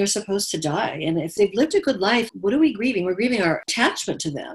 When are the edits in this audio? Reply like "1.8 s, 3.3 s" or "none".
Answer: 1.3 s, 2.3 s, 3.7 s